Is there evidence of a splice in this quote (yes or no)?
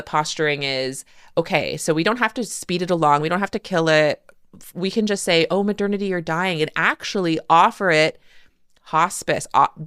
no